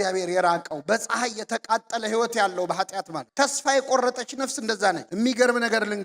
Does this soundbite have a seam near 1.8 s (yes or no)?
no